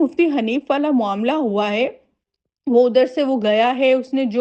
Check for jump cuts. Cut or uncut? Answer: uncut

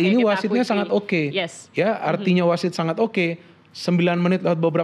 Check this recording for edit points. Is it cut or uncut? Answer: uncut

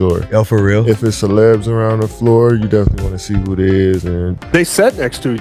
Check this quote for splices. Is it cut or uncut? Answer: cut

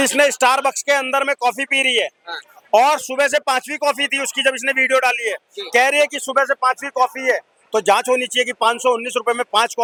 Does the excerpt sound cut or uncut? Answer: uncut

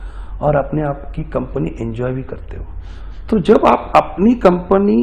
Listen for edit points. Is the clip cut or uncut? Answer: uncut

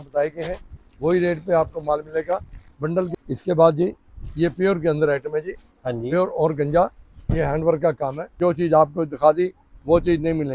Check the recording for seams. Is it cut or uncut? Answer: cut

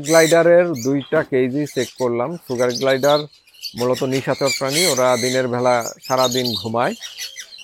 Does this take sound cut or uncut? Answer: uncut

